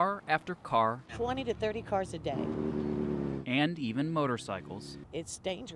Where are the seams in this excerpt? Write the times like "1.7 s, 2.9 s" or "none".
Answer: none